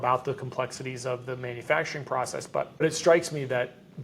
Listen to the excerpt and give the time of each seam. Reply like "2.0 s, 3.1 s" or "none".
2.8 s